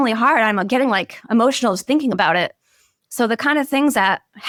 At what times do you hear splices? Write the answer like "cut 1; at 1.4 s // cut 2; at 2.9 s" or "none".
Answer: none